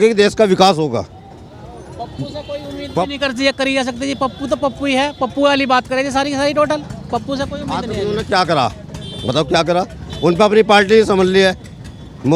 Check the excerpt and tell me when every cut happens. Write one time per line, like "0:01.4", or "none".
none

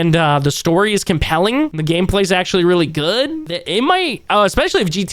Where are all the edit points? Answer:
0:01.8
0:03.5

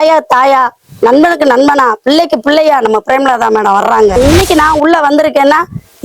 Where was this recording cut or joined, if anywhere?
0:04.2

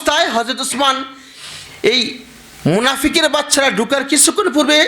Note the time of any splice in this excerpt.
none

